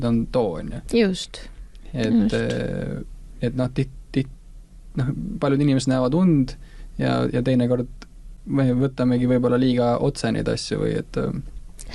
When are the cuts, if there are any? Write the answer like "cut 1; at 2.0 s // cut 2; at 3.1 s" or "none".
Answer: none